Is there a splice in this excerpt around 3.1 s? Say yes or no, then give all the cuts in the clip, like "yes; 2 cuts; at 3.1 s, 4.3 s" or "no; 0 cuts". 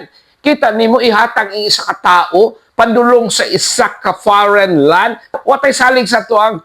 no; 1 cut; at 5.4 s